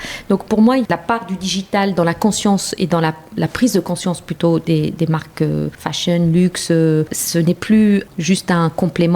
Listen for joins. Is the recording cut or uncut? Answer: cut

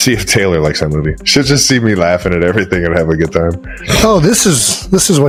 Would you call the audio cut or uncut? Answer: uncut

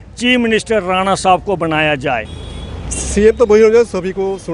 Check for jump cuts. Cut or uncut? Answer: cut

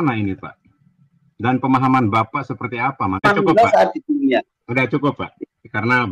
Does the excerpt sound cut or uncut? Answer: cut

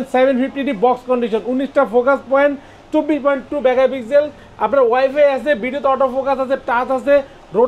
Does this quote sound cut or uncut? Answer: uncut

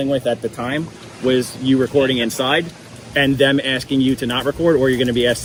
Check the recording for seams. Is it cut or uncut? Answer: uncut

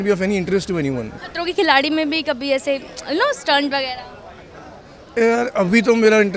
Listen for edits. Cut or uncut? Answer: cut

